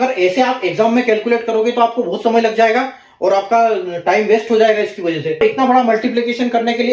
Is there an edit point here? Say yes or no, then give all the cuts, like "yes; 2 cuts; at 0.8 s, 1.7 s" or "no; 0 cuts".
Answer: yes; 1 cut; at 5.4 s